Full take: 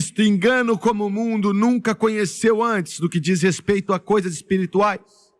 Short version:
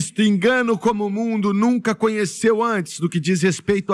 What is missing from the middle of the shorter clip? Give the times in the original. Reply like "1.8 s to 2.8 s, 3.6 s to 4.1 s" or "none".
none